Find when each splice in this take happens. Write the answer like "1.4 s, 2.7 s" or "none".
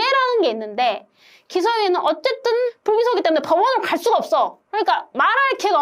2.2 s, 4.6 s